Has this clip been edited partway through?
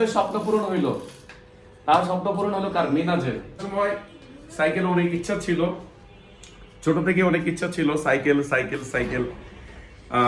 yes; 1 cut; at 3.6 s

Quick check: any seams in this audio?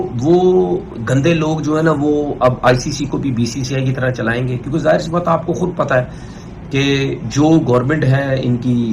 no; 0 cuts

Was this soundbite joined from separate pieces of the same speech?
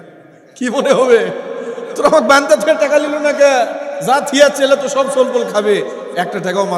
no; 0 cuts

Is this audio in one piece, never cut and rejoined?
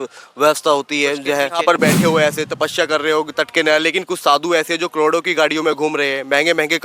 no; 1 cut; at 1.8 s

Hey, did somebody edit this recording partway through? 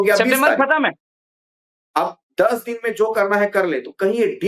no; 0 cuts

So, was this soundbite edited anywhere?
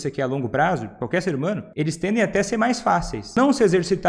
yes; 2 cuts; at 1.7 s, 3.2 s

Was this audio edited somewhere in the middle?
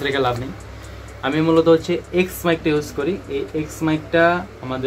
no; 0 cuts

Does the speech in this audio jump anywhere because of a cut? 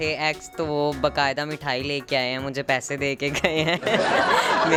no; 0 cuts

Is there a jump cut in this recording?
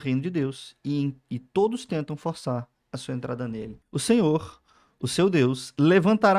yes; 1 cut; at 3.7 s

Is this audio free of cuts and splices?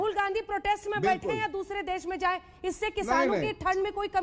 yes; 0 cuts

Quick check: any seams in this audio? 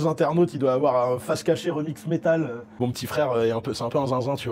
yes; 1 cut; at 2.8 s

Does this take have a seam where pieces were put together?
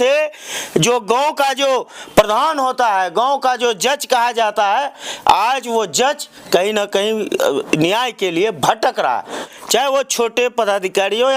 no; 0 cuts

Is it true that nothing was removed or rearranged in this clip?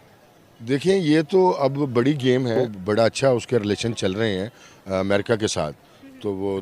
no; 1 cut; at 2.7 s

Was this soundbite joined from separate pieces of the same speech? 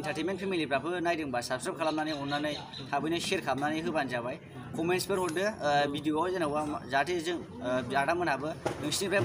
no; 0 cuts

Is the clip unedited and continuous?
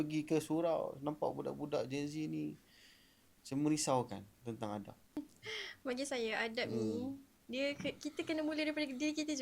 no; 1 cut; at 5.2 s

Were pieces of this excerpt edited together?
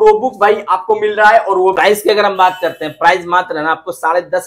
yes; 1 cut; at 1.8 s

